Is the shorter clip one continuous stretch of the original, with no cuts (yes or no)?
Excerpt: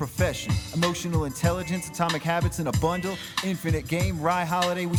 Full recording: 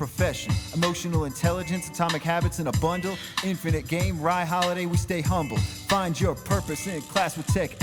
yes